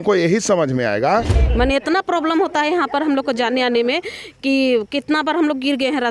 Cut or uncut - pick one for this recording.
cut